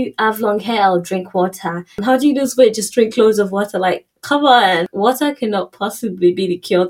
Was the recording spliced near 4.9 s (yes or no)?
yes